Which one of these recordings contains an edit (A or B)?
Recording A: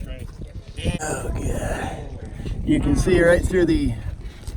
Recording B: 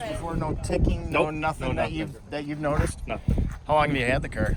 A